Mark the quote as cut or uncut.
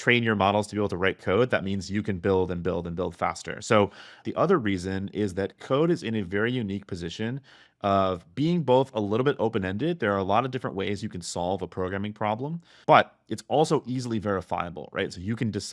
cut